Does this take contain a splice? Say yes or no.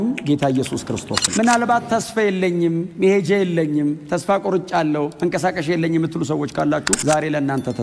yes